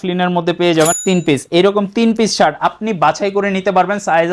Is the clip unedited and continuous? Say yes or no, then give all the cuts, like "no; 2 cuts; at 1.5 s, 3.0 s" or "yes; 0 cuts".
no; 1 cut; at 1.0 s